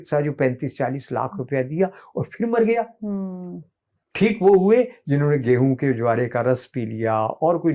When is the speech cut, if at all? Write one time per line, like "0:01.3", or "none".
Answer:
none